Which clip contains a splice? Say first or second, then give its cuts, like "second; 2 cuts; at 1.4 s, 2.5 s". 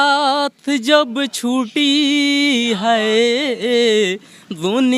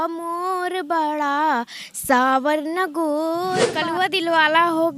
second; 1 cut; at 3.8 s